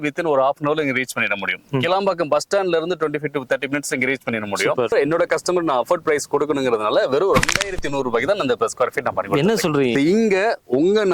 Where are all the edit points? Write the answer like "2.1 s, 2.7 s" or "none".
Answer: 4.9 s, 9.9 s